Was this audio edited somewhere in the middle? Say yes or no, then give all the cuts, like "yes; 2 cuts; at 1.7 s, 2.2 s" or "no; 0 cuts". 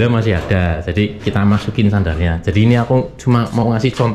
no; 0 cuts